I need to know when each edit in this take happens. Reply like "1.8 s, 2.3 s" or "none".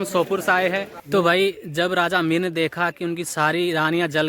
0.9 s

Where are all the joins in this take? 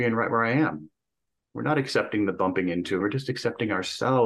3.0 s

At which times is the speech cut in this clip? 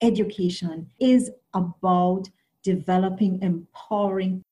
0.9 s

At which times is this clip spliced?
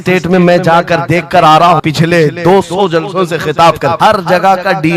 1.8 s, 4.0 s

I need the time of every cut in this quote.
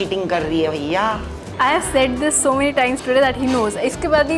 1.4 s

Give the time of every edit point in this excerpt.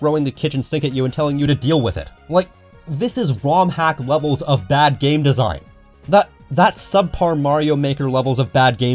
none

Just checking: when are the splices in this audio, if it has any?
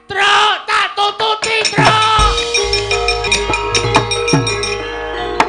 3.3 s

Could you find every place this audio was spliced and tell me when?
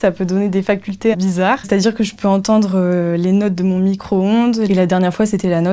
1.4 s, 4.7 s

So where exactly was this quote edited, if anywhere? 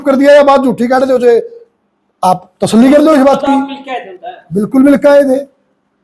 none

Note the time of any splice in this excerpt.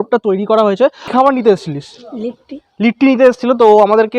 1.1 s

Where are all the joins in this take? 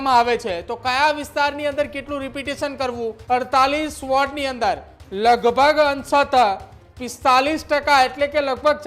3.2 s

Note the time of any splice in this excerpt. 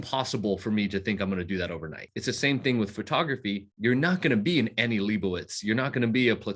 2.1 s, 3.7 s

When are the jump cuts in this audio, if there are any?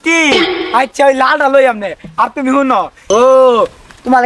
3.0 s

